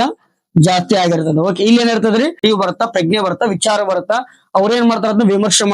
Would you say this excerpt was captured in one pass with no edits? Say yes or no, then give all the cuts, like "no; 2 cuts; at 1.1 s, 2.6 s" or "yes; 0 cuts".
no; 1 cut; at 2.4 s